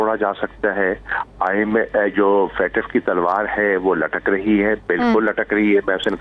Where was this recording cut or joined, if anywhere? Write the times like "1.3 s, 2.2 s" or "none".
none